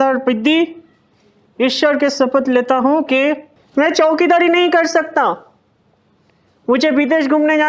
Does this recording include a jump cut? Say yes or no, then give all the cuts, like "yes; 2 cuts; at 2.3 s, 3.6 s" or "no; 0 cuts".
yes; 1 cut; at 3.5 s